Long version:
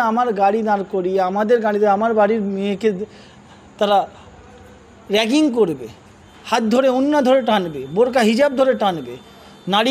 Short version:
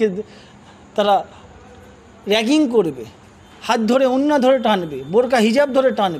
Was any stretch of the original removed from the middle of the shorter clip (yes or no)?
no